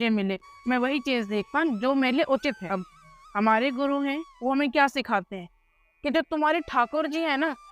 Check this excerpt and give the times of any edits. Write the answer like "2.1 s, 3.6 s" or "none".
2.6 s